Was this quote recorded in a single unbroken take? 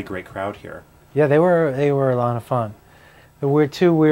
no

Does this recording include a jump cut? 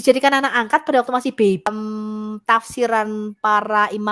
yes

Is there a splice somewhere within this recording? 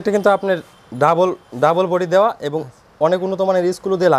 no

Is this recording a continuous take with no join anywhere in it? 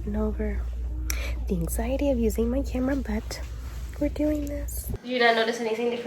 no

